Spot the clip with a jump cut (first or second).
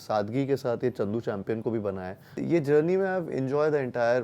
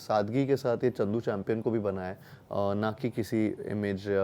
first